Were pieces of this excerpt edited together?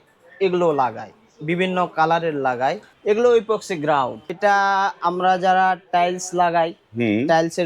yes; 2 cuts; at 2.9 s, 4.3 s

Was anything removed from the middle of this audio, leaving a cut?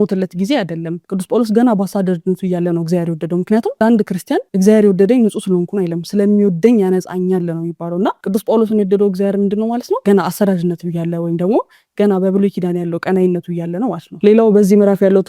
no; 0 cuts

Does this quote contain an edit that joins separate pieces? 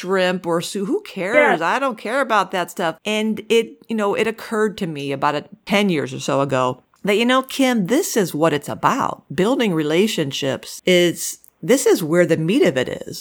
yes; 3 cuts; at 3.0 s, 5.5 s, 10.7 s

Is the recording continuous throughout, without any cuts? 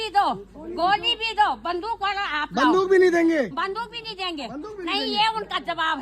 yes; 0 cuts

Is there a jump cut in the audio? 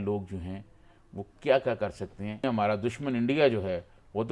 yes; 1 cut; at 2.4 s

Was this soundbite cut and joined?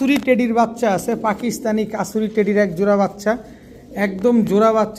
no; 0 cuts

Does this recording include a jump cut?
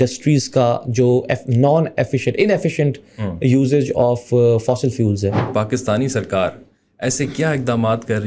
yes; 1 cut; at 5.5 s

